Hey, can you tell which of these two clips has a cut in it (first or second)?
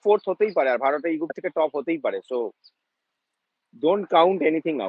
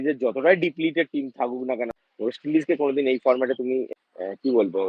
second